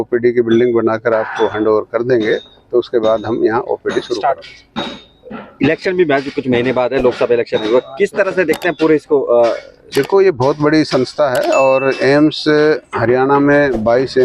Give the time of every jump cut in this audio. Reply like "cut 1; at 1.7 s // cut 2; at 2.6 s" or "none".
none

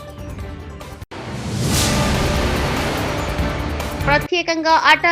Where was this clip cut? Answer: cut 1; at 1.0 s // cut 2; at 4.0 s

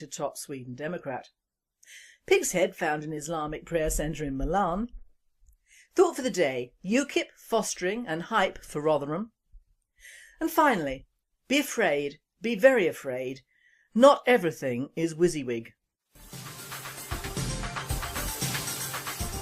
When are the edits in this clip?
cut 1; at 10.4 s

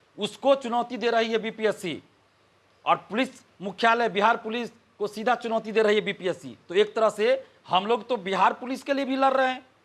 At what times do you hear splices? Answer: none

